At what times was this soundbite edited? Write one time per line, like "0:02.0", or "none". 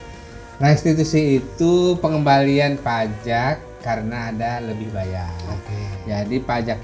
none